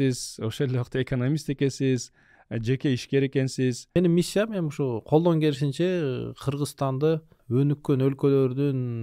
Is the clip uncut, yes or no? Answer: no